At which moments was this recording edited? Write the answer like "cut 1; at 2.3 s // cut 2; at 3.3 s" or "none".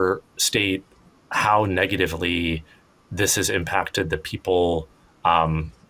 none